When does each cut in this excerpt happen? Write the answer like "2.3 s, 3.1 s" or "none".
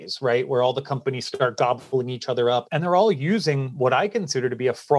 2.7 s